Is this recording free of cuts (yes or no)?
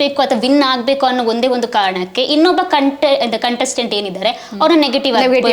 yes